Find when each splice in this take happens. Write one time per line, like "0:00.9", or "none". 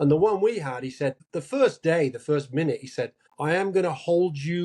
0:01.3
0:03.2